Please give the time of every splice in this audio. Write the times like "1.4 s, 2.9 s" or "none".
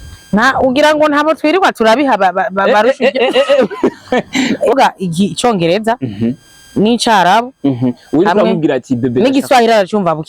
4.7 s

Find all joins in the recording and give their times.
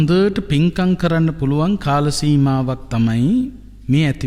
none

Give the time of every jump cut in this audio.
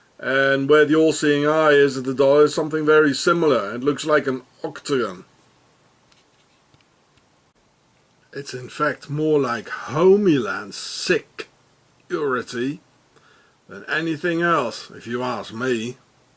13.1 s

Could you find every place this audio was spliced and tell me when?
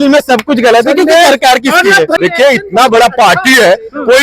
2.2 s

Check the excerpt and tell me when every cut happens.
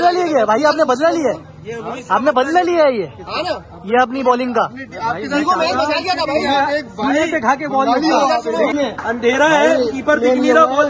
8.7 s

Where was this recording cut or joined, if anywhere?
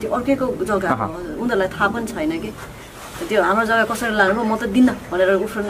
2.6 s

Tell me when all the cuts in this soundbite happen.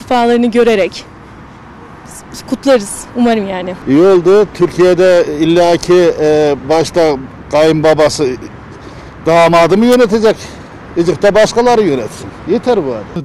none

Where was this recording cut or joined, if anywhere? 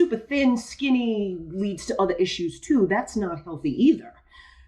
none

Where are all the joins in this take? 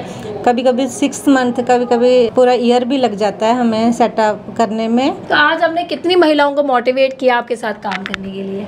2.3 s, 5.2 s

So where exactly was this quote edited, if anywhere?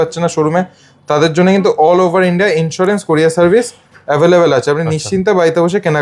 none

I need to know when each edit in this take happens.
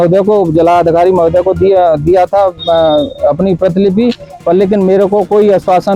none

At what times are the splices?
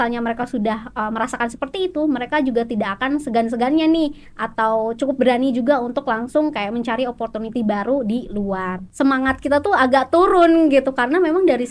8.8 s

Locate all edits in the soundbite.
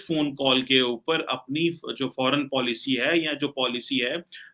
none

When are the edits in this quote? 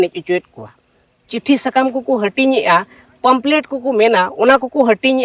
1.3 s

